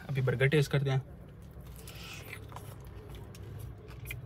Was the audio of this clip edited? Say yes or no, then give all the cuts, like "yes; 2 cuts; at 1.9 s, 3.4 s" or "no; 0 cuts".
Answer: no; 0 cuts